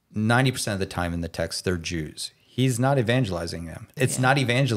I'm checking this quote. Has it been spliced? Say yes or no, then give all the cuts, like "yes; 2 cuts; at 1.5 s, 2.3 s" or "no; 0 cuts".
yes; 1 cut; at 3.8 s